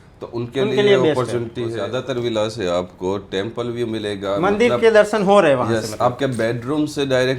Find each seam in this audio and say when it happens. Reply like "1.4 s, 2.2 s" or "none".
1.8 s